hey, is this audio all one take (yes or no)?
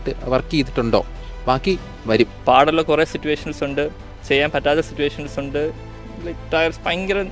no